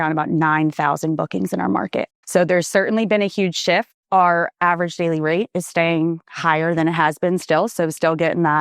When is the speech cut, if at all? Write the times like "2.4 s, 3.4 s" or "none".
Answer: 2.2 s, 4.0 s